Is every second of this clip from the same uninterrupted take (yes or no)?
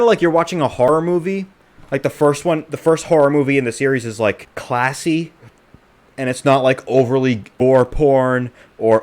no